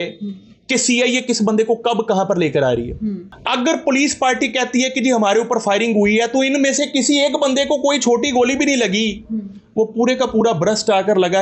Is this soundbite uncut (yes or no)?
no